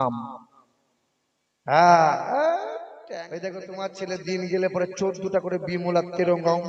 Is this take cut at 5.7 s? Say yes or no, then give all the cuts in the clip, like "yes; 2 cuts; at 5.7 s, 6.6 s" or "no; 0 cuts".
no; 1 cut; at 2.9 s